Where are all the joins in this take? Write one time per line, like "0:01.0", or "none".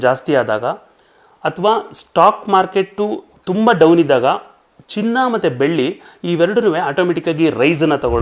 none